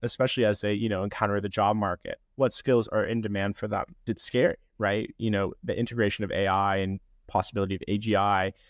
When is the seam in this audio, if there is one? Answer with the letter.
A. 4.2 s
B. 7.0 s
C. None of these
A